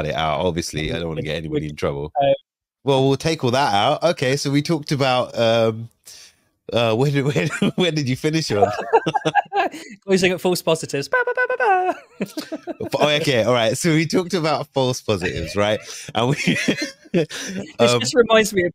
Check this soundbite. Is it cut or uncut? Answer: cut